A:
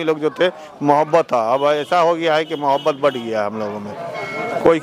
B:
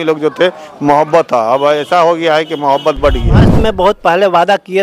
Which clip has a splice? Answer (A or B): B